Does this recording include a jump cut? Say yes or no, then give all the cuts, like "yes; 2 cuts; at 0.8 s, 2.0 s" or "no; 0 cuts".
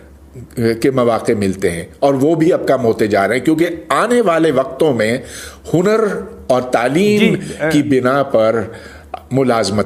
no; 0 cuts